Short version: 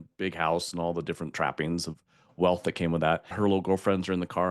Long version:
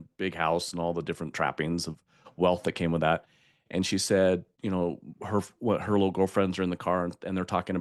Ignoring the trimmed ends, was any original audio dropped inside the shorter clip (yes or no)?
yes